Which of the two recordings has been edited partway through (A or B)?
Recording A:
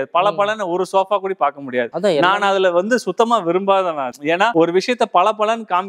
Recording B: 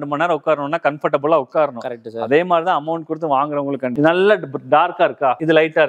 B